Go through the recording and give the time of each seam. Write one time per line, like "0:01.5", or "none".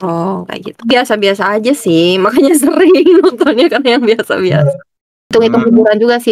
0:00.9
0:05.3